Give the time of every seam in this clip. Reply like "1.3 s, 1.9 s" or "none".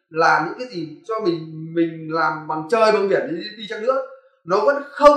none